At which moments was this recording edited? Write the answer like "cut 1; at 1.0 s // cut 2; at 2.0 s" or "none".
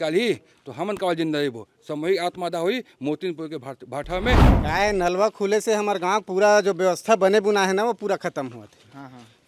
cut 1; at 4.5 s